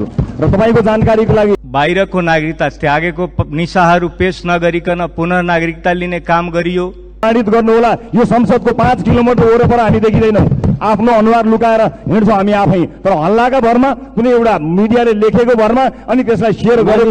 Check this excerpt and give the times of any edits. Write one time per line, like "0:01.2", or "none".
0:01.6
0:07.2